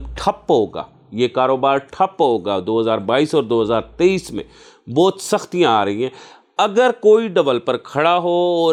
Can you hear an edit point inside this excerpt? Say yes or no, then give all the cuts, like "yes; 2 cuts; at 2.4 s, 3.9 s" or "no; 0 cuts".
no; 0 cuts